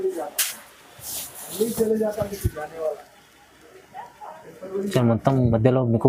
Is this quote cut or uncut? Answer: uncut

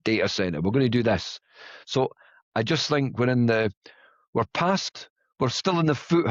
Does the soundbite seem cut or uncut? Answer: uncut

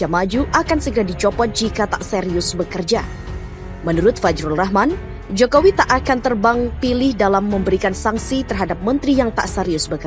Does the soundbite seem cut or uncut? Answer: uncut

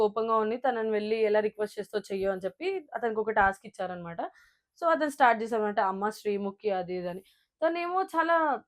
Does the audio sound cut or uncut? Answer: uncut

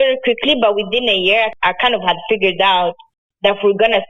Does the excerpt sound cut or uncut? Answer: uncut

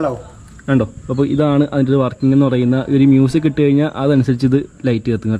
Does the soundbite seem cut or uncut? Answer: uncut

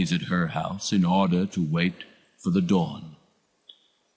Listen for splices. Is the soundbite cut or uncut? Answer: uncut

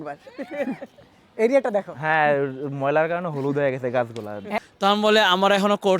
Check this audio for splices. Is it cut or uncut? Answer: cut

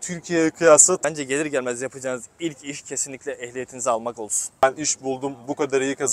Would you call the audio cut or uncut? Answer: cut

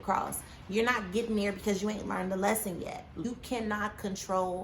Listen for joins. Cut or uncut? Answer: cut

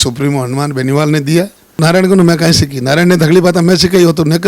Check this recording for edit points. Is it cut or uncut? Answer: cut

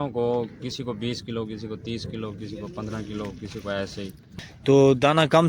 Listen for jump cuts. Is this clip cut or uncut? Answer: cut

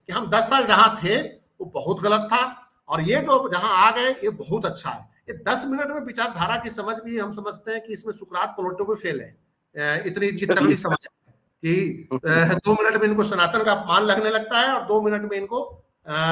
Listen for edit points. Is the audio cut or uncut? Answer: uncut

